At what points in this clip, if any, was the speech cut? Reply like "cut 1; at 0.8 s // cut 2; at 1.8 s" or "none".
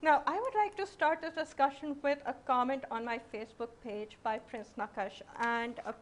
cut 1; at 4.7 s